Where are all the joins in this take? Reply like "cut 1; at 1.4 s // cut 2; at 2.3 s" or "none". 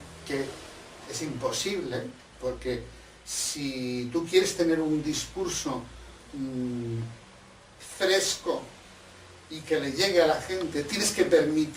none